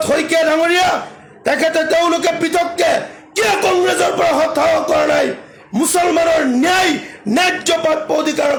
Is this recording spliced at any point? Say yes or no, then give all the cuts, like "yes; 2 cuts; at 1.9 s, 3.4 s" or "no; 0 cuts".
no; 0 cuts